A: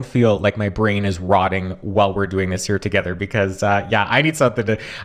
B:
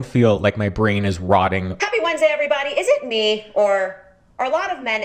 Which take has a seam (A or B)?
B